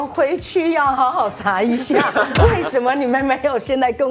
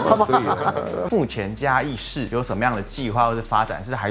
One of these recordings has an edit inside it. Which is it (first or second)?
second